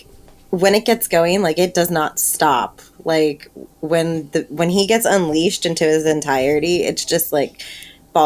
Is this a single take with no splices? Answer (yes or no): yes